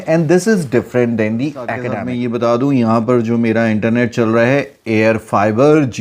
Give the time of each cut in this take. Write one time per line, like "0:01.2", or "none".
0:01.9